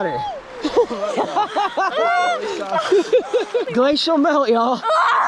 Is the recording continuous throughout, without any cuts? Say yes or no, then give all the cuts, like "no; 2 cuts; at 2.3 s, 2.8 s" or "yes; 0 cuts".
no; 1 cut; at 3.7 s